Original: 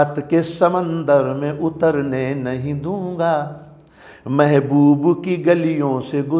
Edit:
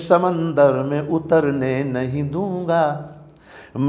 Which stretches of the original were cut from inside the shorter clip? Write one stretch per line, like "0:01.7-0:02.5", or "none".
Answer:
none